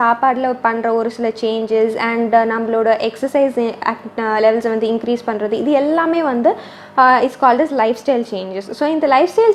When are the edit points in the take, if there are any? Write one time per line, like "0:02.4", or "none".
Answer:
none